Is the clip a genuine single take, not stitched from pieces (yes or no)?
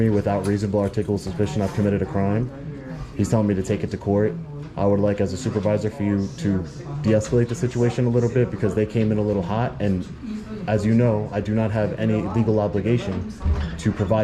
yes